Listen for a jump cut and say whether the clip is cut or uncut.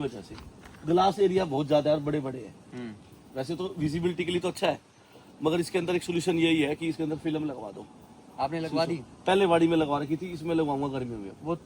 uncut